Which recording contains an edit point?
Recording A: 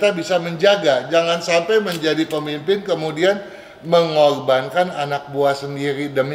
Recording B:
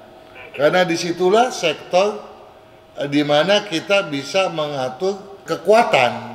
B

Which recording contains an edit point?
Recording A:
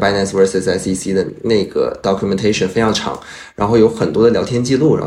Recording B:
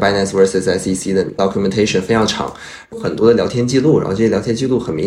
B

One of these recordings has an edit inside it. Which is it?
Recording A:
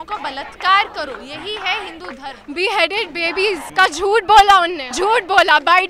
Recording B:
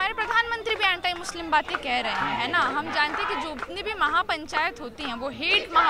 A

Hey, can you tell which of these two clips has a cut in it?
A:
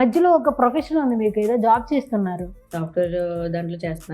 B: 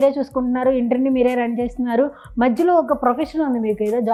A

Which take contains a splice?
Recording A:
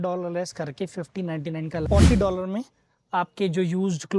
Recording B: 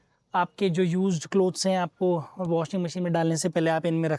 A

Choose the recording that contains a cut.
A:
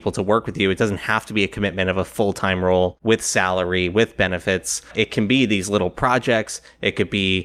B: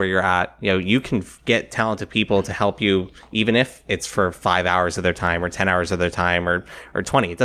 A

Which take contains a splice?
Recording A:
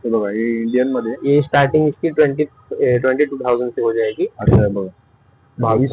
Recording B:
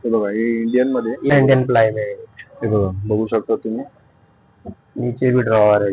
B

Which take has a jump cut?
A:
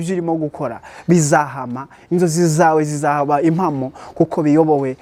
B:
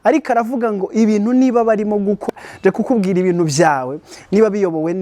B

